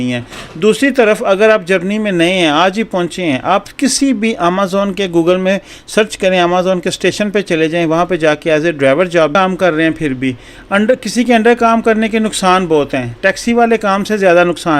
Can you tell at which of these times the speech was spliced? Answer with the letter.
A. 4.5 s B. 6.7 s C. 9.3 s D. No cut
C